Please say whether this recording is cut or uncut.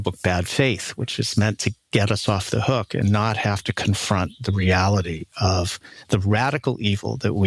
uncut